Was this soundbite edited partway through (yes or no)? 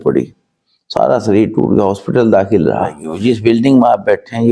yes